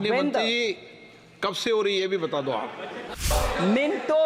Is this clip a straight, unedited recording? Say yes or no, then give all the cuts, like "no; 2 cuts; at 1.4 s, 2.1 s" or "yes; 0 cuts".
no; 1 cut; at 3.1 s